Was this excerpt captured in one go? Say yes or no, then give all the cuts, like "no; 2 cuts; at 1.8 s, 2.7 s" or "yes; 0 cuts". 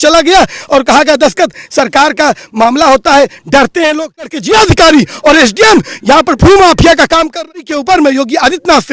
no; 2 cuts; at 4.3 s, 7.5 s